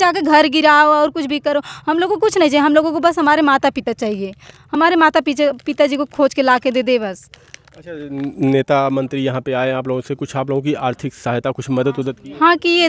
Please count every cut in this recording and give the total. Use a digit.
0